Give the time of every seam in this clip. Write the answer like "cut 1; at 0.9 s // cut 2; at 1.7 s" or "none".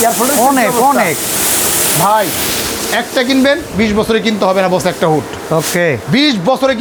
none